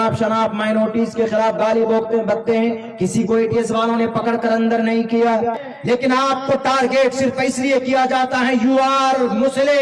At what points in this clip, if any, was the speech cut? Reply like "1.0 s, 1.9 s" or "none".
5.7 s